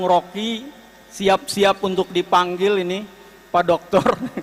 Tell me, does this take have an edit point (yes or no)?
no